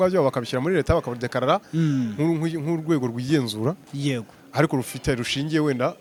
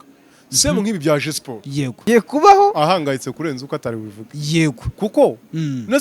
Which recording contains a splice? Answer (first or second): second